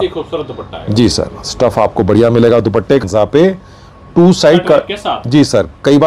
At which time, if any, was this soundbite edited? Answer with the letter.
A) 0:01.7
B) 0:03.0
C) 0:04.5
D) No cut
B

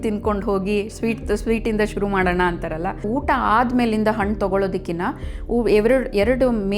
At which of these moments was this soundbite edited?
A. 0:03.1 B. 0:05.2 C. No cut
A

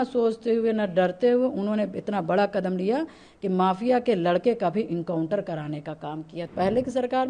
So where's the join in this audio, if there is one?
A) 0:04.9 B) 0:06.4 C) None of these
B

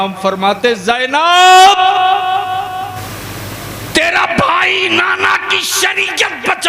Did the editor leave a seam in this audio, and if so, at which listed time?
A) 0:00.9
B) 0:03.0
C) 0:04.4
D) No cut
B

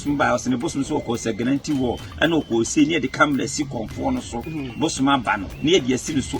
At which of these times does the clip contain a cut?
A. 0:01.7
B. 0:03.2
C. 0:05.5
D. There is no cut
C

